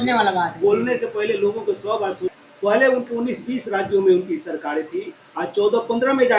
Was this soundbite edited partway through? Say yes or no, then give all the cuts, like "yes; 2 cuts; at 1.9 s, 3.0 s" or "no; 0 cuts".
yes; 1 cut; at 2.4 s